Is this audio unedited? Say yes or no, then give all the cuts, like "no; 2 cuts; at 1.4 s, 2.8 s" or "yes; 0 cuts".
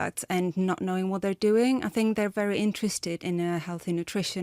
no; 1 cut; at 3.2 s